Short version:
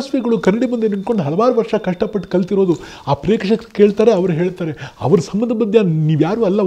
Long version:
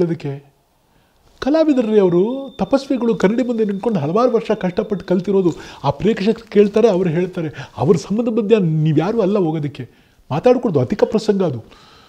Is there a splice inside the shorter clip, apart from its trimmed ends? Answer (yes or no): no